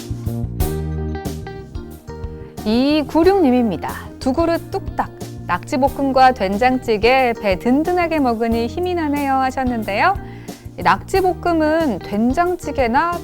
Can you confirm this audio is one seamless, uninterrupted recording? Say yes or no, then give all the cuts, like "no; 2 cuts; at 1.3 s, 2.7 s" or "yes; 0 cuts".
no; 2 cuts; at 1.3 s, 2.6 s